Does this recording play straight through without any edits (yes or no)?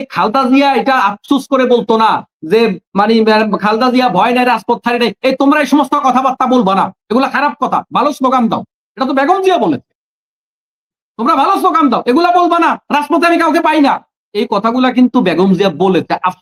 yes